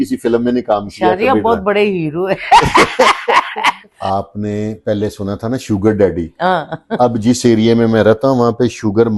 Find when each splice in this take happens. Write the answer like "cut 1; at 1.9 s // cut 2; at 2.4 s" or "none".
cut 1; at 3.9 s